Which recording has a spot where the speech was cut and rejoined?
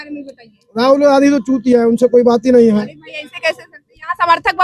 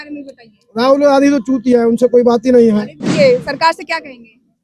second; 1 cut; at 3.1 s

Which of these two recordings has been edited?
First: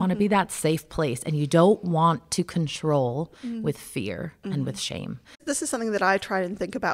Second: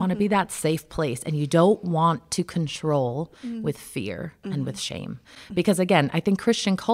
first; 1 cut; at 5.4 s

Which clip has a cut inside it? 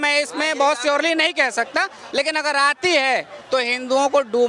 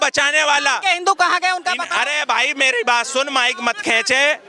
first; 1 cut; at 2.0 s

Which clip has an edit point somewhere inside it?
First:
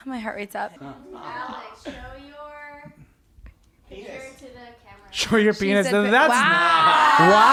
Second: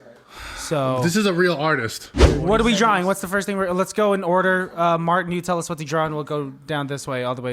second; 1 cut; at 2.3 s

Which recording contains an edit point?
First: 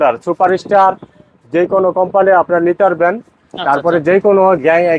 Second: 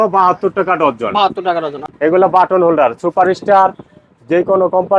second; 1 cut; at 1.9 s

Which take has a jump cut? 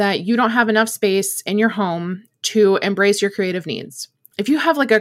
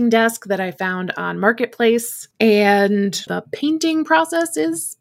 second; 2 cuts; at 2.2 s, 3.3 s

